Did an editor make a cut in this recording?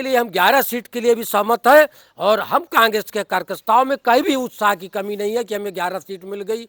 no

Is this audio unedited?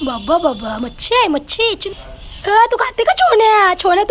yes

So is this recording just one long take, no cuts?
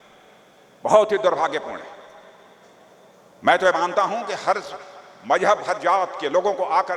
yes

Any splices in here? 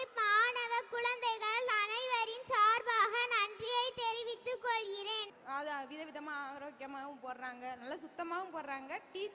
yes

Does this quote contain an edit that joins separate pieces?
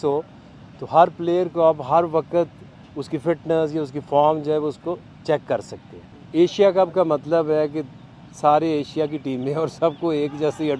yes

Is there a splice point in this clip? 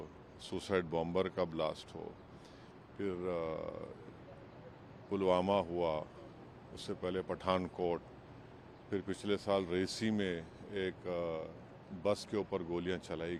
no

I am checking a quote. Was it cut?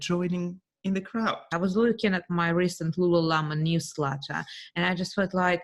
yes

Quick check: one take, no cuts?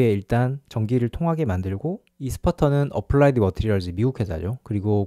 no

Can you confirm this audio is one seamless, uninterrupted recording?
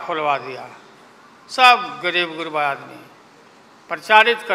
yes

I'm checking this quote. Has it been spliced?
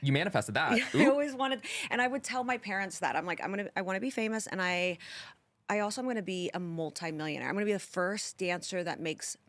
no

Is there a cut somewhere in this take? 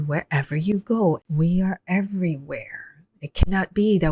yes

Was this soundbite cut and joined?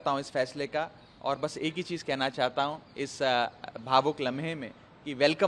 no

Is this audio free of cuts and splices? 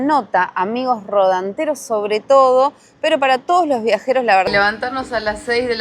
no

